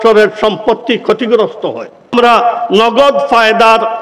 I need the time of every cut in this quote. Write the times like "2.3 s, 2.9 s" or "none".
2.1 s

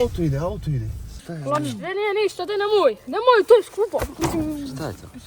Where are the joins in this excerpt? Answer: 1.3 s

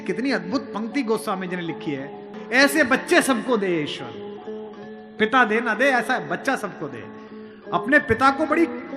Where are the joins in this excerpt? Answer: 2.3 s

